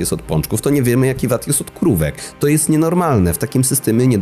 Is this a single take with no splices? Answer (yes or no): yes